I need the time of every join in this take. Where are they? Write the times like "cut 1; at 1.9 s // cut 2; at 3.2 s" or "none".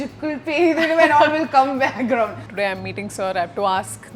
cut 1; at 2.4 s